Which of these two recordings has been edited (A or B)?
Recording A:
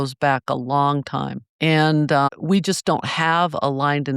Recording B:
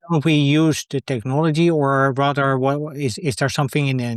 A